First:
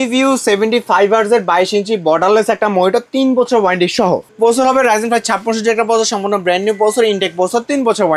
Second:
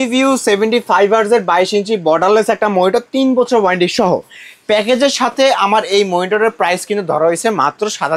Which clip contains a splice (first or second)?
first